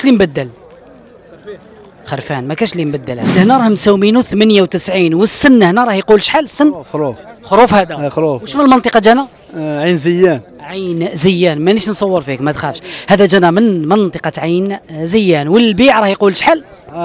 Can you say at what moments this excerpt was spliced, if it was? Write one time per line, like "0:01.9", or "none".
0:03.3